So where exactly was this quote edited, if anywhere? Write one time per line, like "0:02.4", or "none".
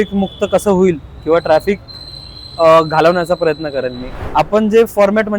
0:04.2